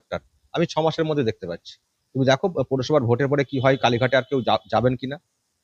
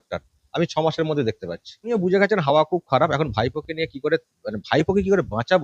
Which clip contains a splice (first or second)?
second